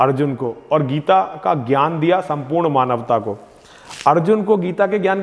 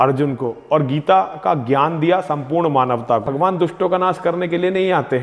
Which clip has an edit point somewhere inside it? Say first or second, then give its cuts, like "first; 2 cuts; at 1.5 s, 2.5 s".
second; 1 cut; at 3.3 s